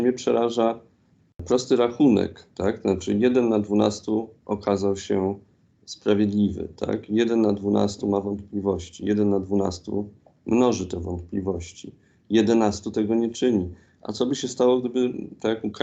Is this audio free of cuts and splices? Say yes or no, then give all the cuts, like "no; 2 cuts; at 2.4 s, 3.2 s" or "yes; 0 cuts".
no; 1 cut; at 1.4 s